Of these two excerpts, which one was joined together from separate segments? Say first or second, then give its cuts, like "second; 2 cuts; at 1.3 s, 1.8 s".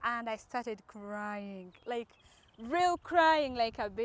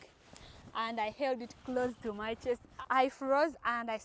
second; 1 cut; at 2.7 s